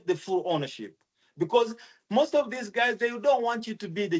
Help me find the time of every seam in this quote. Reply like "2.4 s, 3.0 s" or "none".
none